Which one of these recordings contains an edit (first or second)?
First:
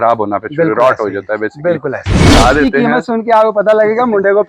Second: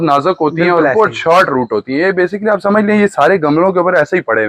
first